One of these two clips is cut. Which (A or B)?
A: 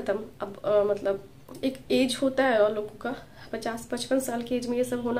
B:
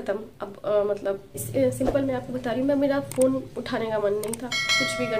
B